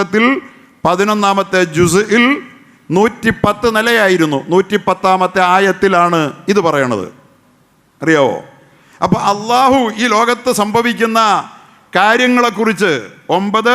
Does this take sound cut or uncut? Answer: uncut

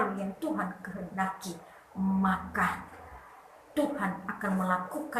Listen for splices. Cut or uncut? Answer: uncut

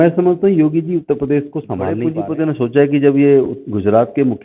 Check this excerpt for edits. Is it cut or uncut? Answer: cut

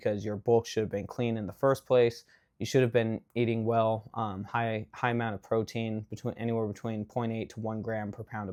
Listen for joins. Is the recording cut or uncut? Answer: uncut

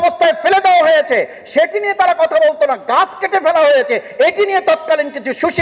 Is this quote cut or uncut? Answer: uncut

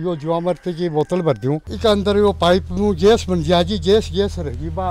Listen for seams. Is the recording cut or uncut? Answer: cut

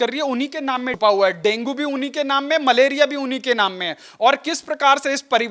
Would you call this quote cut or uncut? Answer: cut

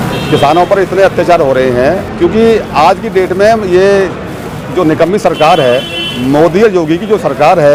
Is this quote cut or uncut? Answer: uncut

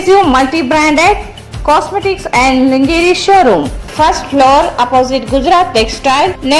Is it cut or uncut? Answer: cut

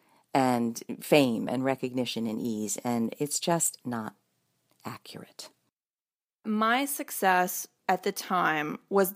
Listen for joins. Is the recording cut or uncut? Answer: cut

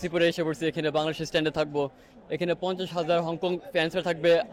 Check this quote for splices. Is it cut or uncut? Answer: uncut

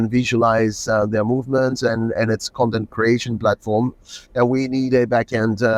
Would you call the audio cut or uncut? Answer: uncut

